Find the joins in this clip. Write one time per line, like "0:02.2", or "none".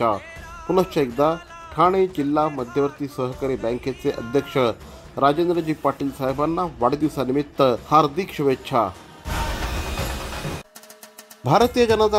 0:10.6